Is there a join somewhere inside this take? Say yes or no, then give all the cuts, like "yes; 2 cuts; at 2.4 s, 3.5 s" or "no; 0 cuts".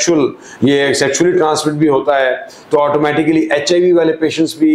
no; 0 cuts